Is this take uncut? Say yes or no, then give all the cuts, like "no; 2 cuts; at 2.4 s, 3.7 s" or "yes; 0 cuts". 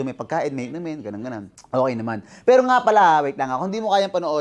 no; 1 cut; at 1.5 s